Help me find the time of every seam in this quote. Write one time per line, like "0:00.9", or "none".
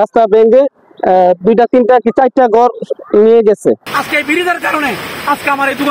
0:03.8